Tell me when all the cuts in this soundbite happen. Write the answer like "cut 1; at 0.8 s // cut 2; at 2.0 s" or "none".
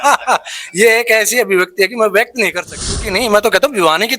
cut 1; at 3.1 s